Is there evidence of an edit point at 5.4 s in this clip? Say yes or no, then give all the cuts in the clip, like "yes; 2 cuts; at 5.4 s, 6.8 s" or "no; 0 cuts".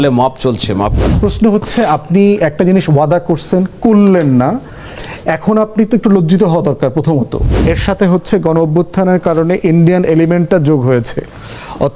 no; 2 cuts; at 1.0 s, 7.5 s